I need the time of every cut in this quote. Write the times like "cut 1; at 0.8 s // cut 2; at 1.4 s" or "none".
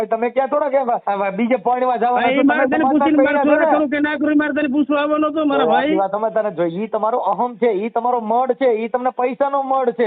cut 1; at 1.0 s